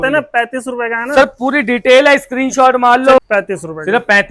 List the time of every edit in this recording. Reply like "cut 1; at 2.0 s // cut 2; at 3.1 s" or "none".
cut 1; at 3.2 s